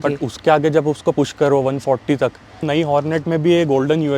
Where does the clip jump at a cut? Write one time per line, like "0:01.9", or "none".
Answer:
0:02.6